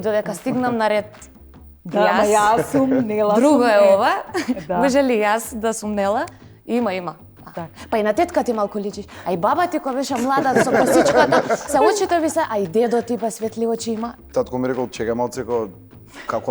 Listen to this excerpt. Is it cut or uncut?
cut